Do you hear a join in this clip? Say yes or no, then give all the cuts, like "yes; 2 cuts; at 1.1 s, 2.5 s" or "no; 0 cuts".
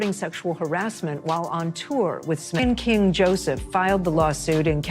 yes; 1 cut; at 2.5 s